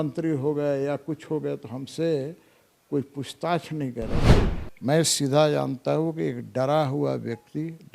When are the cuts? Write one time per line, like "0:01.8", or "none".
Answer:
0:04.2